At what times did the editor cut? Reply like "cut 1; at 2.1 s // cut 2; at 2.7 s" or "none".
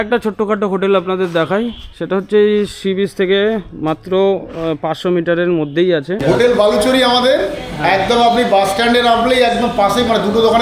cut 1; at 6.2 s